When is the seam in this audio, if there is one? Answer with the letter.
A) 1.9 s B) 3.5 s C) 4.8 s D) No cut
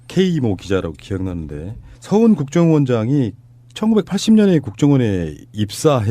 C